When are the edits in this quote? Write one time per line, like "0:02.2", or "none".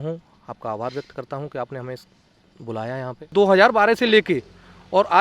0:03.3